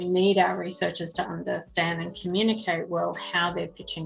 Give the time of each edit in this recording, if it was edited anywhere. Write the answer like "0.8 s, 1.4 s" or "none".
none